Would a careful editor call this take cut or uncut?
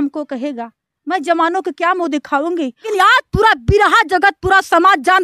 cut